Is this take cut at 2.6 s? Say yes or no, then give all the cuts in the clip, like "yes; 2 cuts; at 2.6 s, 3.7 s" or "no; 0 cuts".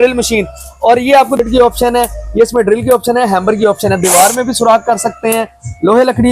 no; 1 cut; at 1.4 s